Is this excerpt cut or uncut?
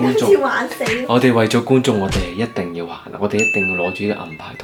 uncut